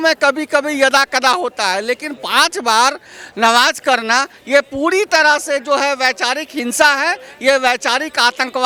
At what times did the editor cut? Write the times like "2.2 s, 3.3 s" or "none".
none

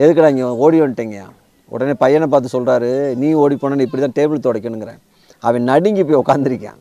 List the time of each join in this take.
none

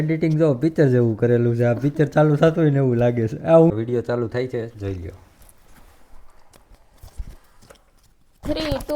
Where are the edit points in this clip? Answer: 3.7 s

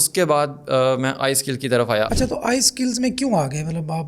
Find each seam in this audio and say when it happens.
2.1 s

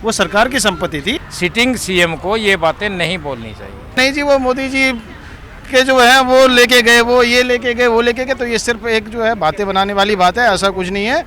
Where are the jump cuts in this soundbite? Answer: 1.2 s, 4.0 s

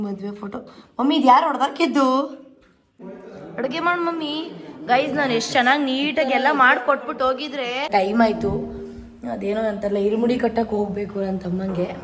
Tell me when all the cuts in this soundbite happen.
3.0 s, 7.9 s

